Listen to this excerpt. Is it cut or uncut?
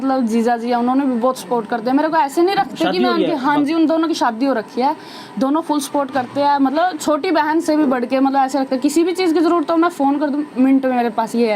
uncut